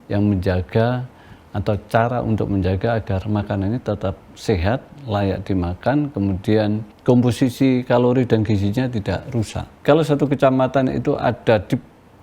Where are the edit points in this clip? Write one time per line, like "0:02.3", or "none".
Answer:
0:06.9
0:09.7